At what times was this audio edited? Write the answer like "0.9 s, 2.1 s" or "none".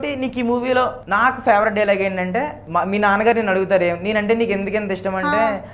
1.0 s, 2.6 s